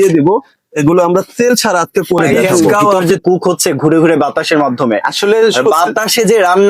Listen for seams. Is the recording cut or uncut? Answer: cut